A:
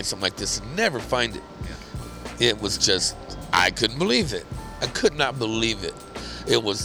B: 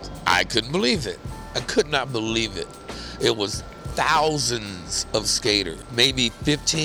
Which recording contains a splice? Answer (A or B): B